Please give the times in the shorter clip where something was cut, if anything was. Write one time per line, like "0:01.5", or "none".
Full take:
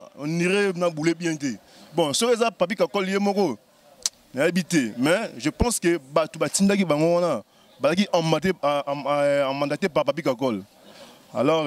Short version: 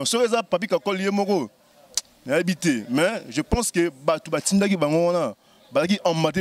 none